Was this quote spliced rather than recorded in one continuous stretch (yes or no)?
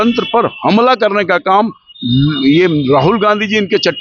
no